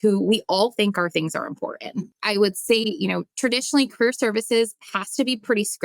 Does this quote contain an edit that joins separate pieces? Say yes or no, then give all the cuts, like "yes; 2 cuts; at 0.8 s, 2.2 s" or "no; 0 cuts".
yes; 2 cuts; at 2.1 s, 3.3 s